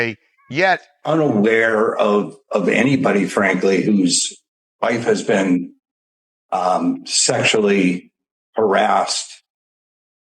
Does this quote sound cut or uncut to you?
cut